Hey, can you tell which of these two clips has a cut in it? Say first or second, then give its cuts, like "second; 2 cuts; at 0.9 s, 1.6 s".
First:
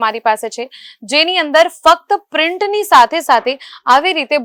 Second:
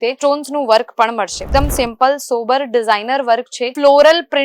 second; 1 cut; at 1.5 s